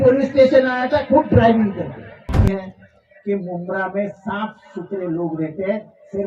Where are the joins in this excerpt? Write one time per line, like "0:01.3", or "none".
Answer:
0:02.4